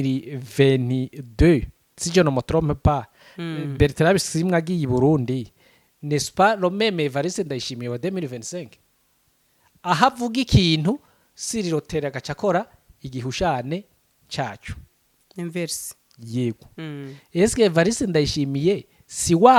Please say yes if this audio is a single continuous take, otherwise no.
yes